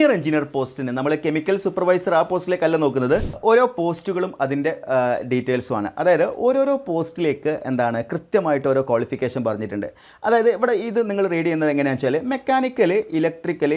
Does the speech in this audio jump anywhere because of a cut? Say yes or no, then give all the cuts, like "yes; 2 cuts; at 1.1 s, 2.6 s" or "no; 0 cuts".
yes; 1 cut; at 3.4 s